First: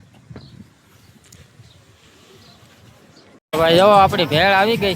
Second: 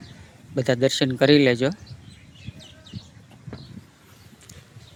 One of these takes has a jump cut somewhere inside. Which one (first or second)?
first